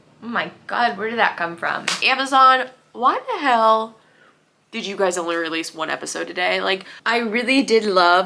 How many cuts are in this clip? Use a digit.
2